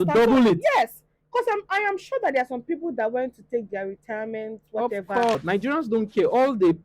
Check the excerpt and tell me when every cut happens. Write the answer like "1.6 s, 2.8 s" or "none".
5.3 s